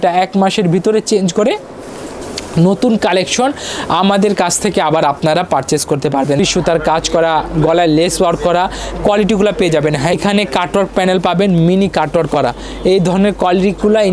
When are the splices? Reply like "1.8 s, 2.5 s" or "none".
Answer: 6.4 s, 10.2 s